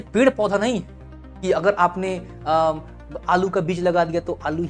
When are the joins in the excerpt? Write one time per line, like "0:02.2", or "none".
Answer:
none